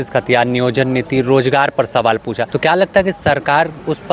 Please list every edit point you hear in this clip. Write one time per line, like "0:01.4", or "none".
0:02.5